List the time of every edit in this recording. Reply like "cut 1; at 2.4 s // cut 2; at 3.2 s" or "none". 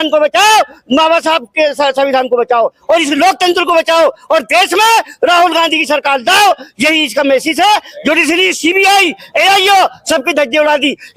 none